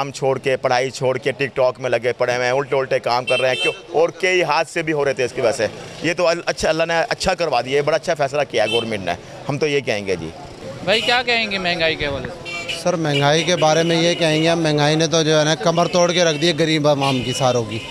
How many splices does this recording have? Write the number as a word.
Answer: zero